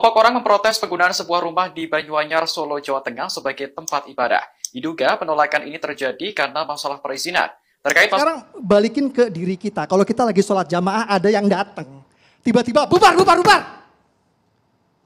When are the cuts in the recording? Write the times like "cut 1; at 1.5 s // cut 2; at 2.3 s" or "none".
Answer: cut 1; at 8.2 s